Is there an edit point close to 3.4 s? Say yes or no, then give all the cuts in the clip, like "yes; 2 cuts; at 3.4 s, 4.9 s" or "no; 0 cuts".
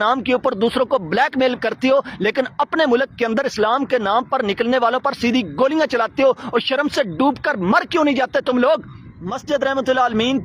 no; 1 cut; at 9.4 s